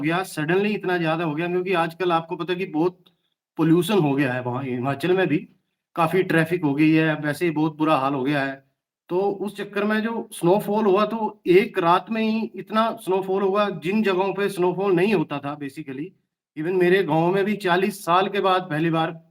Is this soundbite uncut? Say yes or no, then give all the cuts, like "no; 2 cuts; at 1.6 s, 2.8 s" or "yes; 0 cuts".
yes; 0 cuts